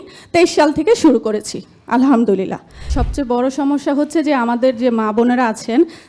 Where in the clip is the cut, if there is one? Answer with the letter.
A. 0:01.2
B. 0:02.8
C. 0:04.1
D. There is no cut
B